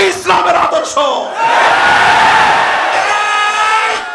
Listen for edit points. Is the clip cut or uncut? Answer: uncut